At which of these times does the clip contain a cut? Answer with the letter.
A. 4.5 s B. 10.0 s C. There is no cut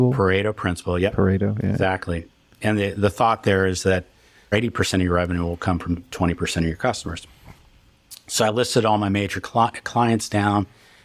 A